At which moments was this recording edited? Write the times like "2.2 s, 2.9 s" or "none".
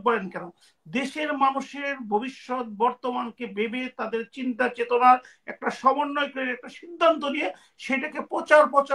none